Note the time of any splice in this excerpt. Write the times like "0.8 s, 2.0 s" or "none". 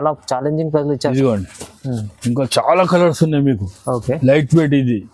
1.1 s